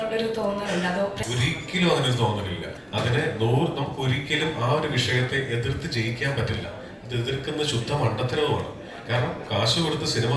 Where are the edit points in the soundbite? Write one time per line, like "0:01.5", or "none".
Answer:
0:01.2
0:02.8